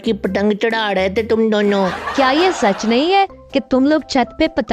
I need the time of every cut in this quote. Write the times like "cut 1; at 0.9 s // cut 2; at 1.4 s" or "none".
none